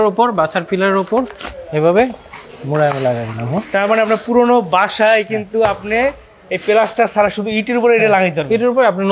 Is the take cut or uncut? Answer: uncut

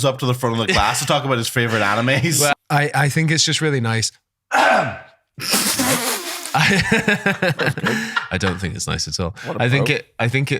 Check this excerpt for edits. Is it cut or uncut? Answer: cut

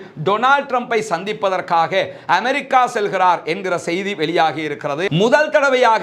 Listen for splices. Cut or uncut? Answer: cut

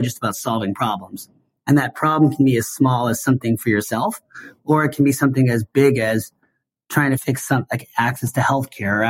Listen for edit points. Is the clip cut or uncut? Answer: cut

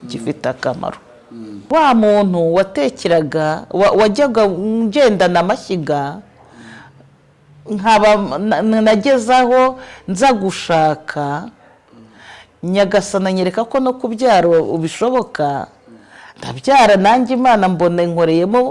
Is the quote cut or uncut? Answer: cut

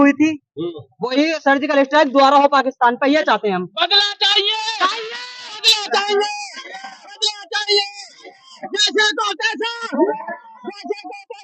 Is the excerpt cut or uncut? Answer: uncut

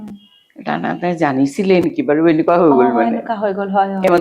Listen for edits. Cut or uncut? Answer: uncut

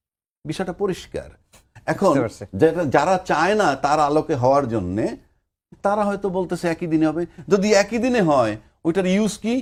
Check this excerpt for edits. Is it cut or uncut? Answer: uncut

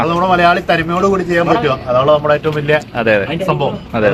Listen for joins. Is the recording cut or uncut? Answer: uncut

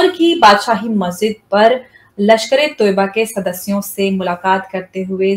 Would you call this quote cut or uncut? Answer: uncut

